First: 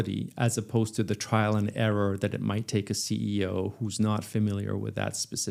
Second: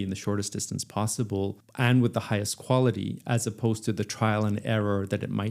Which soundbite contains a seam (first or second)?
second